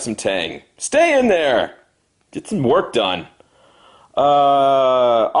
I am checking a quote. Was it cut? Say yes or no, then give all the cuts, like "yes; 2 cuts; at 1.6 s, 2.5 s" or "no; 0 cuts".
yes; 1 cut; at 4.1 s